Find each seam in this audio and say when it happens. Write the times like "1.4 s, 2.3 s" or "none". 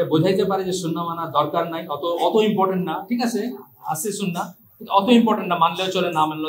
none